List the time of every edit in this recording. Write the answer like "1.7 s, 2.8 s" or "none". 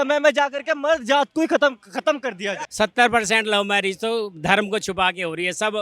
2.6 s